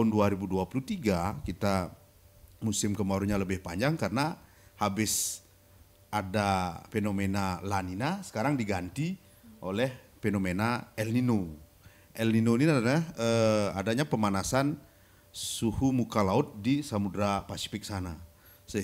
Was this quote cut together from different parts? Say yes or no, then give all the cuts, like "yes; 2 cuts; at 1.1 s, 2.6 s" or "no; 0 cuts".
no; 0 cuts